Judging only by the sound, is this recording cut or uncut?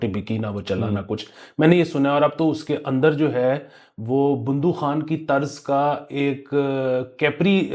uncut